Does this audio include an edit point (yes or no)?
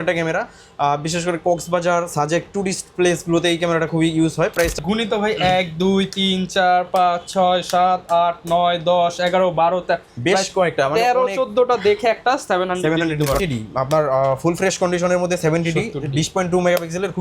yes